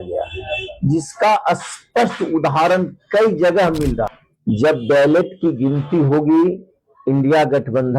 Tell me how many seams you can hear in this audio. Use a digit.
1